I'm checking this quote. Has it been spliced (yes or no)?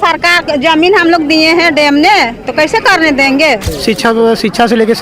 yes